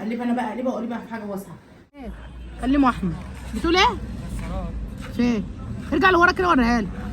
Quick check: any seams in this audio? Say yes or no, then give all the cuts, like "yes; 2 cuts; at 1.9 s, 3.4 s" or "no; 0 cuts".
yes; 1 cut; at 2.0 s